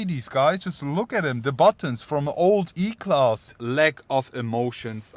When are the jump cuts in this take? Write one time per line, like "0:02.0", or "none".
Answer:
0:03.5